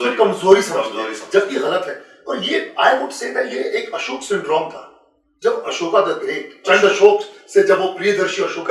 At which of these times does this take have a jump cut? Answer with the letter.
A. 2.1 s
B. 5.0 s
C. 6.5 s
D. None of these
D